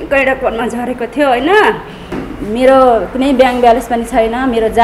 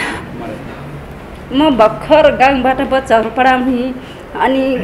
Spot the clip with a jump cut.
first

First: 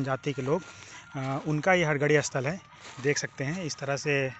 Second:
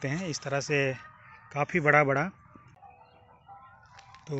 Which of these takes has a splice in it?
second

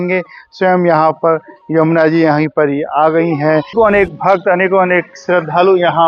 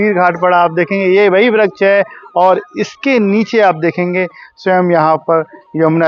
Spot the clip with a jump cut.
first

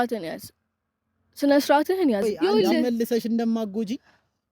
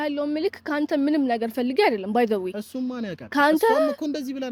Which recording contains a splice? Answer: first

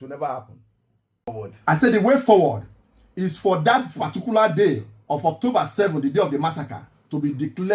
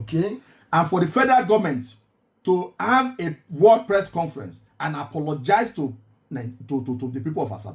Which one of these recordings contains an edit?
first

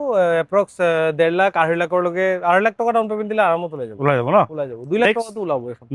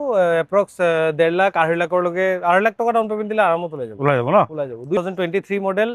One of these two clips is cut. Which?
second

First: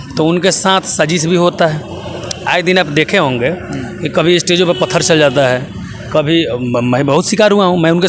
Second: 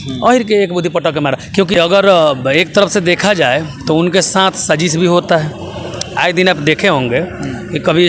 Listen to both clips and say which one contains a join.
second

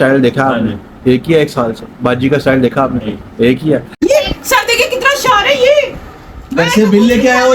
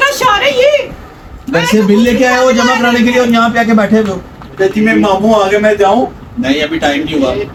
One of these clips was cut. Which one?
first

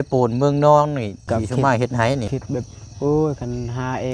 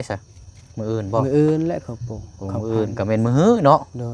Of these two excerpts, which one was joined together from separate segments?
first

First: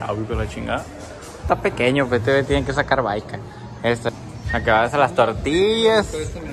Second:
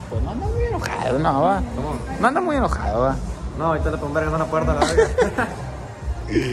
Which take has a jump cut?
first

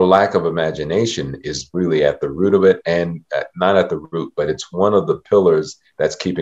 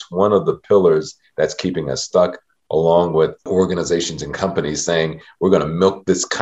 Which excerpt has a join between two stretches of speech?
second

